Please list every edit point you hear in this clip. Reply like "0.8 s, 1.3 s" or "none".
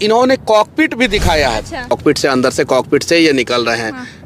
1.9 s